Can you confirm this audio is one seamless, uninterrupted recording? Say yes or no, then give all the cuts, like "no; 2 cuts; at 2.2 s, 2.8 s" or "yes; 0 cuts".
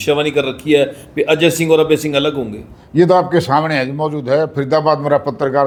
yes; 0 cuts